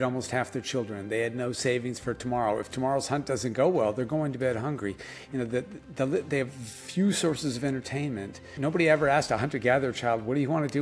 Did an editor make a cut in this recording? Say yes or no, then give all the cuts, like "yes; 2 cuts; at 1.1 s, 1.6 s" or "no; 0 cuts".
yes; 1 cut; at 8.5 s